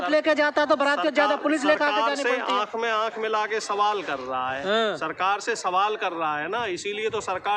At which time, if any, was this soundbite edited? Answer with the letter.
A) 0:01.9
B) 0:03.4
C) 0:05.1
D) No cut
D